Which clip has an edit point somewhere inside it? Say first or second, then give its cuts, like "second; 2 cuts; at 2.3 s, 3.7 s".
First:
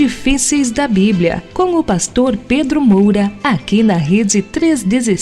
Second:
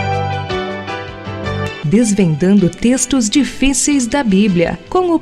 first; 1 cut; at 3.3 s